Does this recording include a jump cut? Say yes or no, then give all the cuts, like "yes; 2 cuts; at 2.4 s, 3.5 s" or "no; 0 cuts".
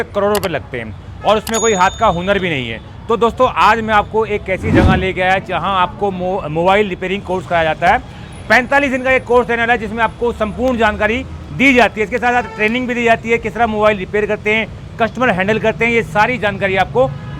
no; 0 cuts